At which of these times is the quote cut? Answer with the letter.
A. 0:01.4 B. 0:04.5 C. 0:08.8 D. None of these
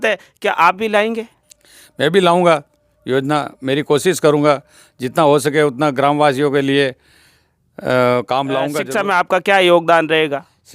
C